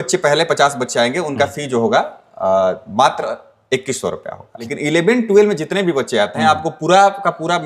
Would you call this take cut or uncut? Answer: cut